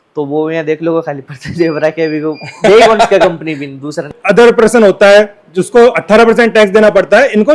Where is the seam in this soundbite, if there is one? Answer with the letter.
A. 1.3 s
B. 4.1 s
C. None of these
B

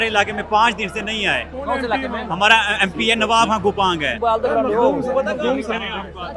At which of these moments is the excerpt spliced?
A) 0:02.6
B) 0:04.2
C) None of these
B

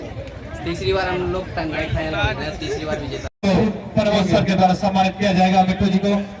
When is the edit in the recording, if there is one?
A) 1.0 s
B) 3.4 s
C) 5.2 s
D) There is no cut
B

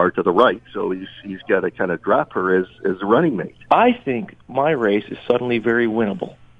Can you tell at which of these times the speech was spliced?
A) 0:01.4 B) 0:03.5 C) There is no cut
B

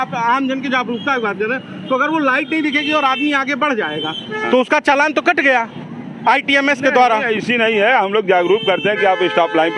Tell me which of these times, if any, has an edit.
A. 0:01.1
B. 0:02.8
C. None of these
C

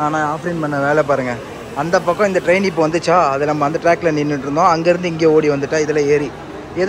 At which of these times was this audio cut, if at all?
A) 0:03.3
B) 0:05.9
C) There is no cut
C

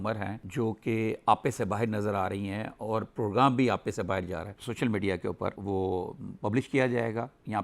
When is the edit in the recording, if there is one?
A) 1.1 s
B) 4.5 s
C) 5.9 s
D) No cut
B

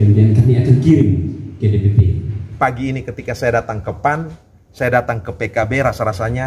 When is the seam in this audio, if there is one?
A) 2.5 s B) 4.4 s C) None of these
A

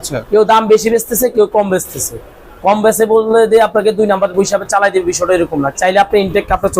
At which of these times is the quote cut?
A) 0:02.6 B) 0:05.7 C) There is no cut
B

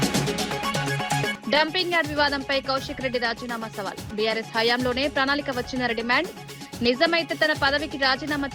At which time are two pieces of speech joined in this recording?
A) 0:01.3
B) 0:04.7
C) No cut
A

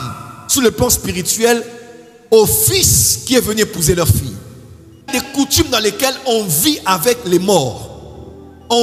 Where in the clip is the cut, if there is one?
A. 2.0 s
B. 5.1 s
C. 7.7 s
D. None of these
B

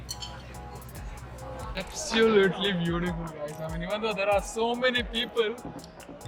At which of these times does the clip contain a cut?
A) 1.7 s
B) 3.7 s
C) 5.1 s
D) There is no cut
A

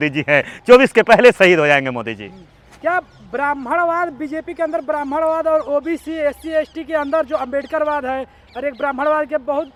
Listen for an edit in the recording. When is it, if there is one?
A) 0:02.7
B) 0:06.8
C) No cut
C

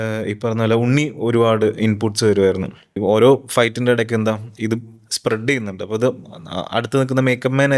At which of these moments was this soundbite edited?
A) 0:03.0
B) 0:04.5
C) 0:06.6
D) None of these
A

